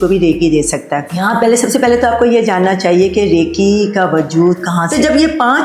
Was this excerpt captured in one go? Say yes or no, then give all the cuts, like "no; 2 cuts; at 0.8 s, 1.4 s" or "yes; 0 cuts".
no; 2 cuts; at 1.1 s, 4.8 s